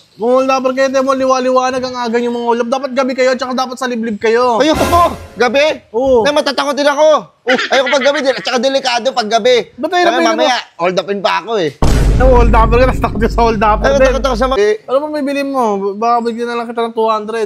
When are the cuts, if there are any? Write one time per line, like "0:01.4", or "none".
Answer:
0:14.5